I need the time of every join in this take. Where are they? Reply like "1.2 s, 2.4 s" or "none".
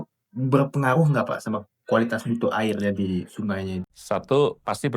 3.9 s